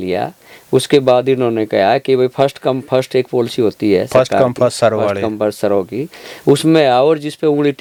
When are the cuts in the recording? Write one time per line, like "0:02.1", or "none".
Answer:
none